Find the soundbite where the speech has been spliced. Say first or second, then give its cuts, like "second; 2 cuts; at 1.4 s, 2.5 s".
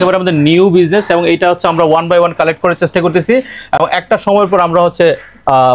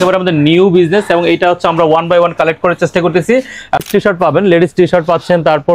second; 1 cut; at 3.8 s